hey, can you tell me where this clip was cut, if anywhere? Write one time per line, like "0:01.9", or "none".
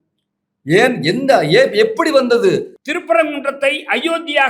0:02.8